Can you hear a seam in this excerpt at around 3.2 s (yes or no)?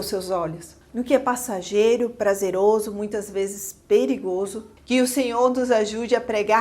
no